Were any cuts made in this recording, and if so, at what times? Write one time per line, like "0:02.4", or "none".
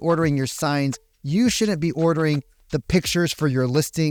none